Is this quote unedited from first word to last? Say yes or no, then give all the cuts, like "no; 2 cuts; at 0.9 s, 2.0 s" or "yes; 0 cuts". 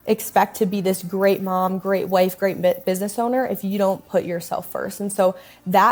yes; 0 cuts